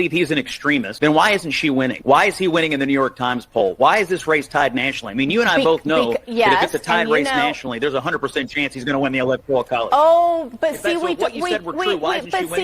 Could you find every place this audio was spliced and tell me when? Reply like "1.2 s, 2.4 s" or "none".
0.9 s, 2.0 s